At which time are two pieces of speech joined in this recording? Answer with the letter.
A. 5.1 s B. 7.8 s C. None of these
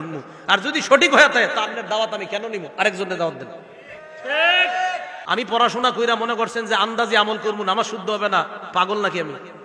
A